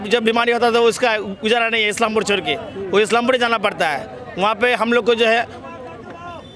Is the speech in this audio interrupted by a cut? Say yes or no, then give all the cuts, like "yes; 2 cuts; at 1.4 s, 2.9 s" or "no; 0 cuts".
no; 0 cuts